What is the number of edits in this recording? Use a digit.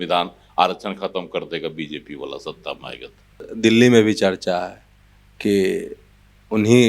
1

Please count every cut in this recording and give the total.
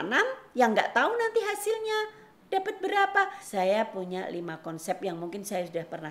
1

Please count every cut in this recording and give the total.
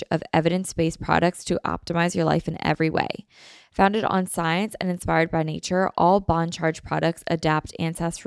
0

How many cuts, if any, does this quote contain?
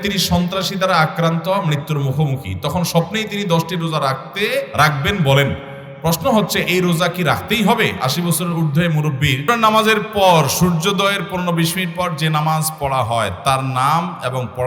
2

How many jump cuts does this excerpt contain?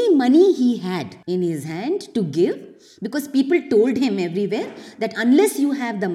1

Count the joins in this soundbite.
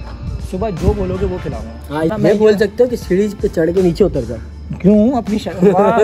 1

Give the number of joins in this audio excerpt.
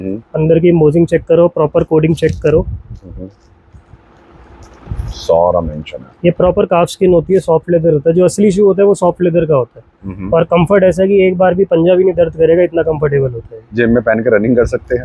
0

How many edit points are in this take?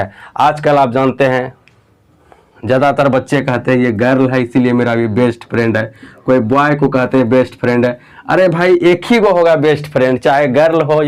0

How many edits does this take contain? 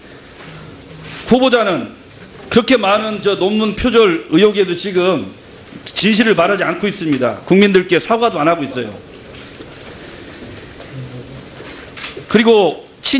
0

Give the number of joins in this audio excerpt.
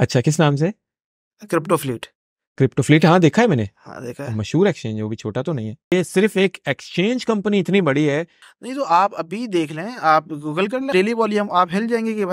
3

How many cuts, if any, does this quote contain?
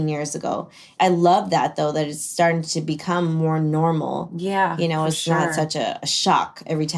1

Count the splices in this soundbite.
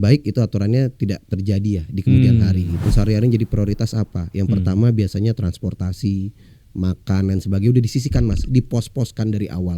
1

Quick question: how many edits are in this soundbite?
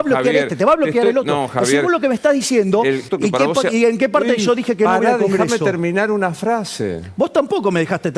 1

